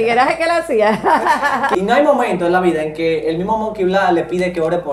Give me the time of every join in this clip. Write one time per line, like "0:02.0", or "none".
0:01.7